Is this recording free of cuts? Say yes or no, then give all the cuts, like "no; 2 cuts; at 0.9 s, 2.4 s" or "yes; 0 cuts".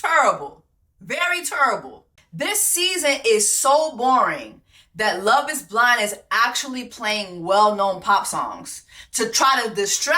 no; 1 cut; at 2.0 s